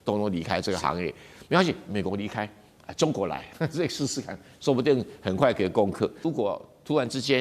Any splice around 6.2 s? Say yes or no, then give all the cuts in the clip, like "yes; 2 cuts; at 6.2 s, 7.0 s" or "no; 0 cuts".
yes; 1 cut; at 6.2 s